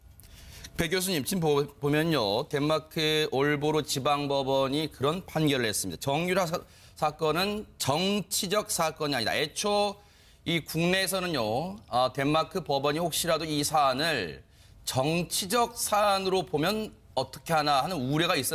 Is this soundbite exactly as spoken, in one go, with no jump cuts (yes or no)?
yes